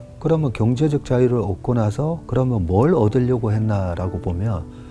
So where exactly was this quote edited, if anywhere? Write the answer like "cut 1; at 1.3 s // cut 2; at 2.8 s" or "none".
none